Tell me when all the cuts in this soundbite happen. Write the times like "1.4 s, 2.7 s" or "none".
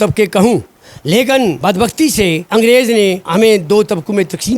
1.6 s, 2.4 s, 3.2 s